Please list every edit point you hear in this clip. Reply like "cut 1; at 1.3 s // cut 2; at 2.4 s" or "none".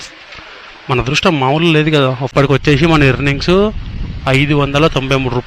cut 1; at 2.3 s